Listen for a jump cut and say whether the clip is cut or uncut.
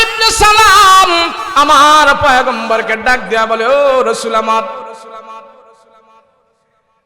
cut